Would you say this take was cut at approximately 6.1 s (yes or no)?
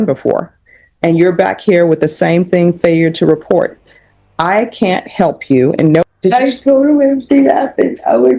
yes